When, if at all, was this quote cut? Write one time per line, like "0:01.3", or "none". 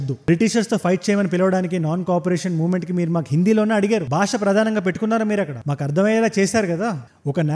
none